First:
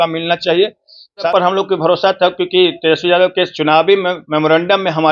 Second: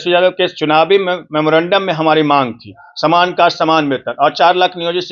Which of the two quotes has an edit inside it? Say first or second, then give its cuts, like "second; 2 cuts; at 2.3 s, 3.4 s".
first; 1 cut; at 1.3 s